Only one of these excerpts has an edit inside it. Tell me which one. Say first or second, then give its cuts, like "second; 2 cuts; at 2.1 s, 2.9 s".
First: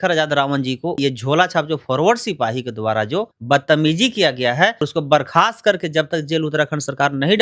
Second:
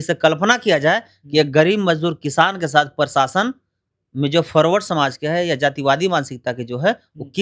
first; 3 cuts; at 1.0 s, 3.3 s, 4.8 s